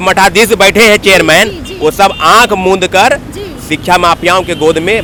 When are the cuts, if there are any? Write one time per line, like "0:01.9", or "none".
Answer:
none